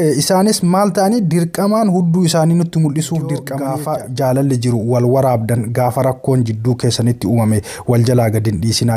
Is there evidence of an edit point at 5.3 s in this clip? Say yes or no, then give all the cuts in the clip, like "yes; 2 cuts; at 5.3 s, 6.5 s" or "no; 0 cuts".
no; 1 cut; at 3.5 s